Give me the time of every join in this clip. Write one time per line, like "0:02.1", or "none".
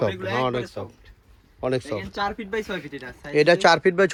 none